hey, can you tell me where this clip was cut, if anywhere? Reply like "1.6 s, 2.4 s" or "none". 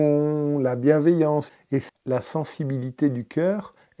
1.5 s